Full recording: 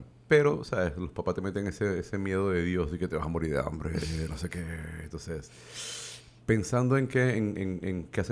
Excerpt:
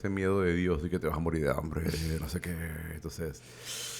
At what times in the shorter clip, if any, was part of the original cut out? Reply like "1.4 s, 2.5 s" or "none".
none